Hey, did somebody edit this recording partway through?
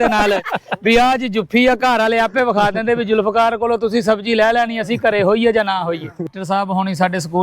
yes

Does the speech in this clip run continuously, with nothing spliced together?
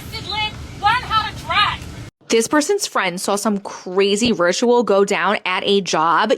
no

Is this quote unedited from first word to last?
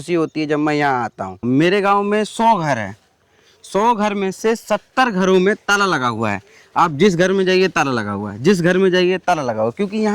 no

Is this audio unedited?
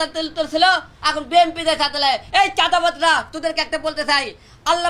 yes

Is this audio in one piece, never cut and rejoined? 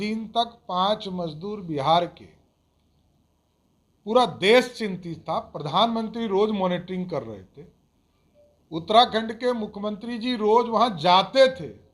yes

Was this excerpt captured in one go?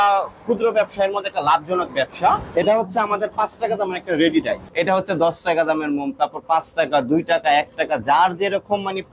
no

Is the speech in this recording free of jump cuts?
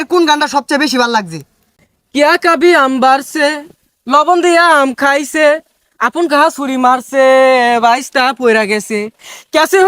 no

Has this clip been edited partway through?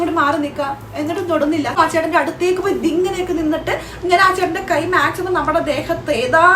yes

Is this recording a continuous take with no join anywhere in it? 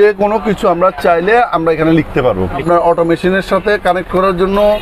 no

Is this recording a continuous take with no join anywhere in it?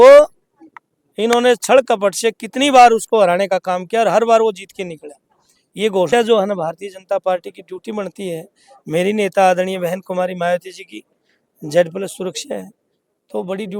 no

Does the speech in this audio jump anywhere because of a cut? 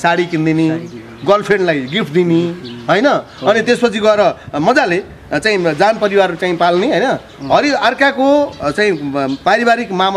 no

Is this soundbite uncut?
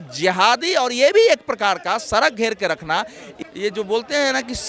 no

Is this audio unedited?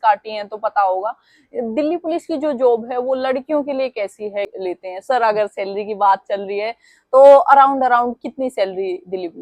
no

